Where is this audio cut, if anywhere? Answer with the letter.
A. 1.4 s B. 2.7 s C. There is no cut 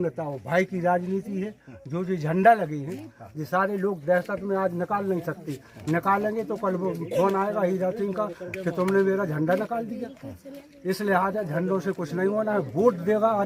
C